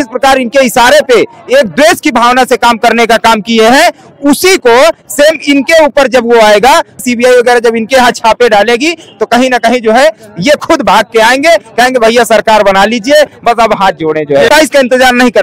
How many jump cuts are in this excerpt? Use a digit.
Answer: 2